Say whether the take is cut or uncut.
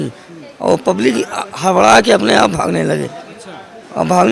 uncut